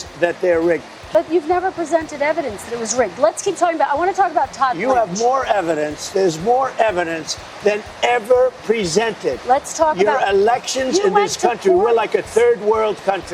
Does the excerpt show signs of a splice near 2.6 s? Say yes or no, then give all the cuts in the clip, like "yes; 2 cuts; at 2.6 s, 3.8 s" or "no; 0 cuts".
no; 1 cut; at 1.0 s